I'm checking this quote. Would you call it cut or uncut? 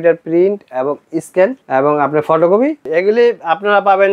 cut